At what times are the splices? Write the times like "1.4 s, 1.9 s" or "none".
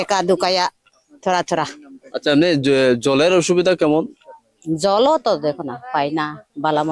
none